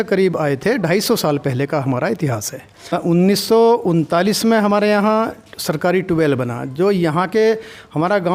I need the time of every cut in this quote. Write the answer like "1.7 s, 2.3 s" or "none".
3.0 s